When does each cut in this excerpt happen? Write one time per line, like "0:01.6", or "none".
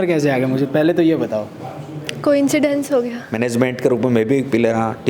0:03.2